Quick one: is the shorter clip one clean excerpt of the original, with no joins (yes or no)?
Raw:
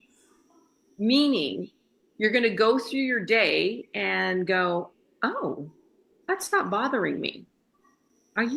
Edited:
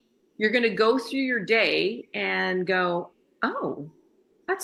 yes